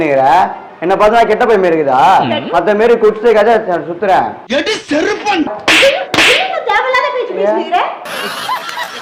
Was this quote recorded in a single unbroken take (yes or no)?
yes